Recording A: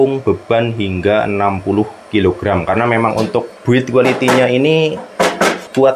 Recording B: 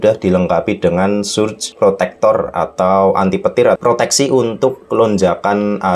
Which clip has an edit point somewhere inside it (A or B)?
B